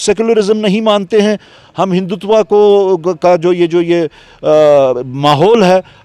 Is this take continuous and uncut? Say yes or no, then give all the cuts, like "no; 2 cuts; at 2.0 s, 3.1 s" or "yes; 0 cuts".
yes; 0 cuts